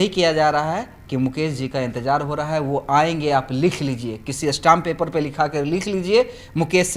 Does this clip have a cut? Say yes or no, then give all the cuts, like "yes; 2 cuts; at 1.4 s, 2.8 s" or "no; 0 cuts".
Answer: no; 0 cuts